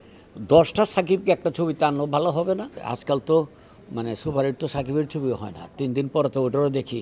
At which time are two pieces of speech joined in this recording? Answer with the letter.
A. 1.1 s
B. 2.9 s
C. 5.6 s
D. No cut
B